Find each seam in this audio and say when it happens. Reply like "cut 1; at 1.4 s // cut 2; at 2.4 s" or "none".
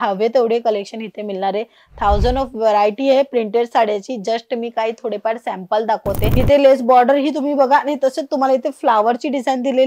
cut 1; at 6.3 s

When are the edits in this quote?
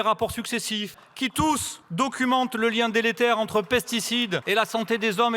cut 1; at 1.0 s // cut 2; at 1.8 s // cut 3; at 4.4 s

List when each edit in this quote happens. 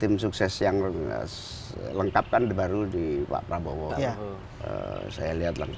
cut 1; at 4.5 s

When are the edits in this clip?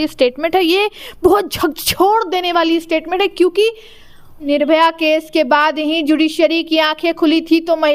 cut 1; at 4.4 s

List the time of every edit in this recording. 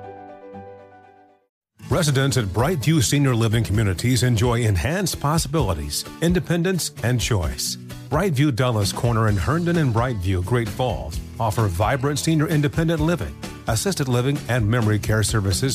cut 1; at 1.6 s

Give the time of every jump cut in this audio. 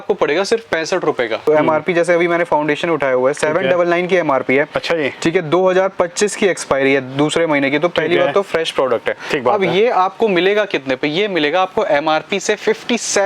cut 1; at 1.4 s

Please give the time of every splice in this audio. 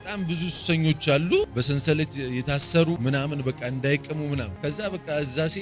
cut 1; at 1.5 s // cut 2; at 3.0 s // cut 3; at 4.5 s

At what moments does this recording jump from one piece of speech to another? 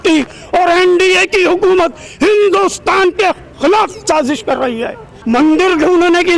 cut 1; at 5.1 s

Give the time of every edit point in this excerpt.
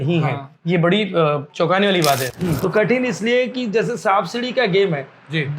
cut 1; at 2.3 s

